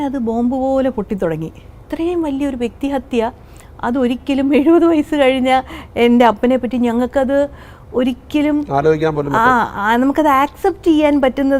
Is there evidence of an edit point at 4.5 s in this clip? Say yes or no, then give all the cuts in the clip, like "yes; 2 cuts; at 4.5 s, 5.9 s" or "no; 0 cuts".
no; 1 cut; at 1.8 s